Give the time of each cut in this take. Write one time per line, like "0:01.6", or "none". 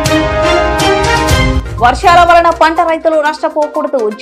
0:01.6